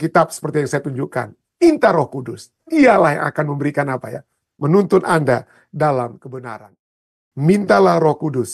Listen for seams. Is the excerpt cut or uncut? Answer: cut